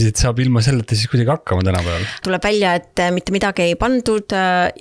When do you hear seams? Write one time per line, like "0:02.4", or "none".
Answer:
0:02.2